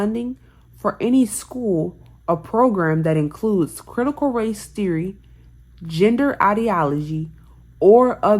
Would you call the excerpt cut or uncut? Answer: uncut